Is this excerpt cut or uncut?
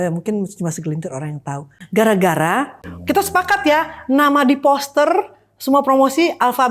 cut